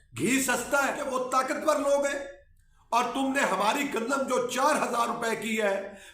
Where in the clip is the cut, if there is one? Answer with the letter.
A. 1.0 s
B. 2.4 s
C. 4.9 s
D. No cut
A